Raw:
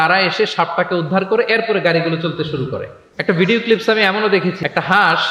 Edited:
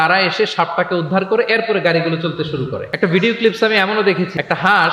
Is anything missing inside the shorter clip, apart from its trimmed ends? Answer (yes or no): yes